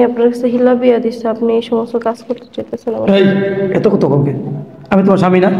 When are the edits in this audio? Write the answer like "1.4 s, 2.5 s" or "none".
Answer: none